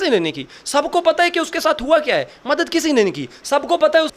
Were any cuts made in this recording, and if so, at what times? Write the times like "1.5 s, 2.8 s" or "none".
none